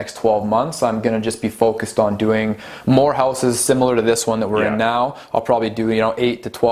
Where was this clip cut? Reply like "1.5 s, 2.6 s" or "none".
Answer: none